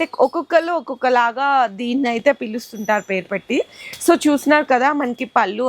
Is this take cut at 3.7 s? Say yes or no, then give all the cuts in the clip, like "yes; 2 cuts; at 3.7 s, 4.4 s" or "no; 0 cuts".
no; 0 cuts